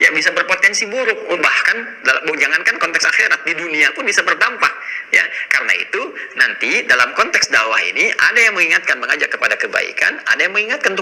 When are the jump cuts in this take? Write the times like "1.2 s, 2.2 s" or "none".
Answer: none